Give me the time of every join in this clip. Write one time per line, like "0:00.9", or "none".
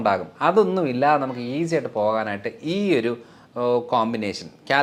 none